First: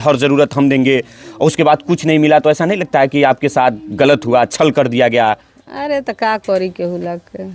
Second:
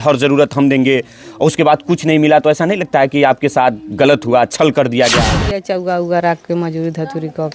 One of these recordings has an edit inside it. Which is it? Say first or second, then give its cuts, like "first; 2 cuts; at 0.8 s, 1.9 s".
second; 1 cut; at 5.3 s